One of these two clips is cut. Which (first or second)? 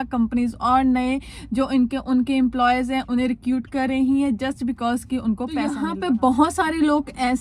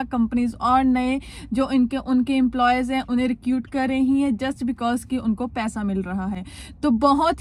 first